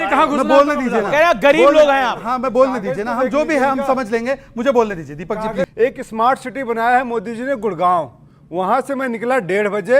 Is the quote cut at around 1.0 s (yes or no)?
no